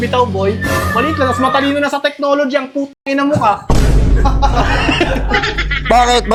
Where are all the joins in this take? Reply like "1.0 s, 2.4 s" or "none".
none